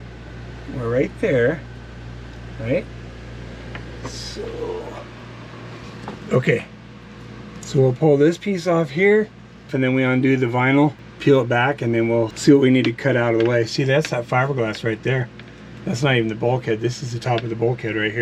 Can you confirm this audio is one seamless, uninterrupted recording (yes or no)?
no